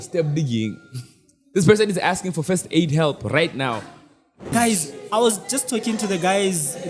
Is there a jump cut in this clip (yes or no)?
yes